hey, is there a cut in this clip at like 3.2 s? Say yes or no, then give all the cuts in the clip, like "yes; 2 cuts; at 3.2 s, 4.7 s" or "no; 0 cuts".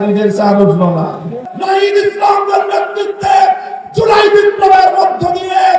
no; 1 cut; at 1.4 s